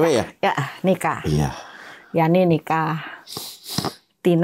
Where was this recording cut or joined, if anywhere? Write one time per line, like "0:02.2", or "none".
none

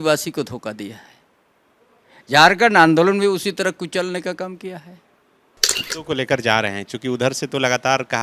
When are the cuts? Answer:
0:05.8

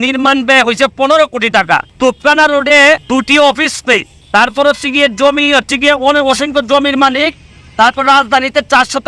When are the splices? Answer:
0:01.9
0:03.0
0:04.1

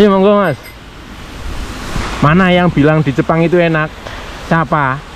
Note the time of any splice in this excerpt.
0:02.1

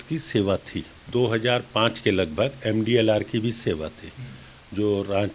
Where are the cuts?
0:01.0

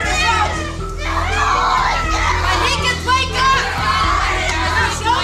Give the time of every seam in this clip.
none

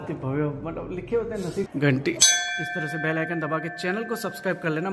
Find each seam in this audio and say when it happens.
0:01.7

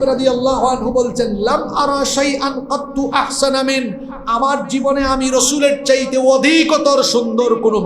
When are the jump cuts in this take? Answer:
none

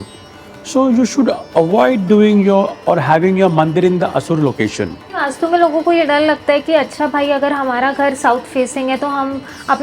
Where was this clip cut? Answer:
0:05.3

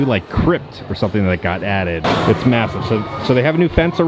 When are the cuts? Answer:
none

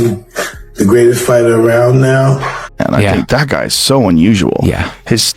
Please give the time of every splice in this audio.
0:02.8

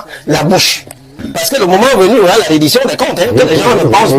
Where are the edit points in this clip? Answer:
0:01.4

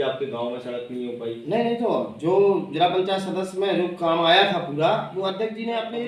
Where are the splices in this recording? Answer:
none

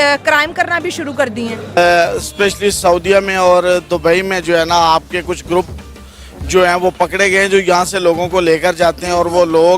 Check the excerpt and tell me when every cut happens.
0:01.7

